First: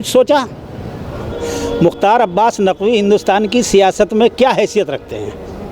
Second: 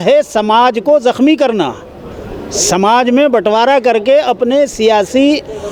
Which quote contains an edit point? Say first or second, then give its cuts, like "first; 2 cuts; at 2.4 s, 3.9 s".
first; 1 cut; at 1.2 s